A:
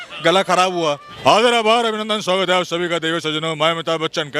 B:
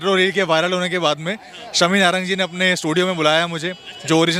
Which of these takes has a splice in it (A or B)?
A